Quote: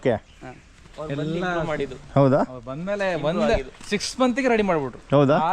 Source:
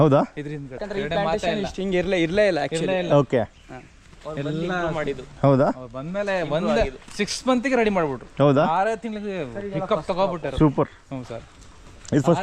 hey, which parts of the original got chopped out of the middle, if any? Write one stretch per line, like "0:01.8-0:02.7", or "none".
none